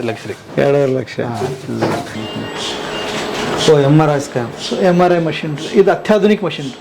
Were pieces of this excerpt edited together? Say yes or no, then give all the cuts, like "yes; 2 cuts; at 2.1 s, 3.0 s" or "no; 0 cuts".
yes; 1 cut; at 2.2 s